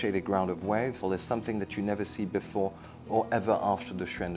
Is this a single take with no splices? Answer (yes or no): no